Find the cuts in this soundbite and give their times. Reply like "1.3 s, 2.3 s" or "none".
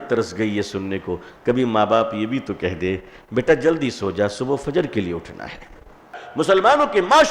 6.2 s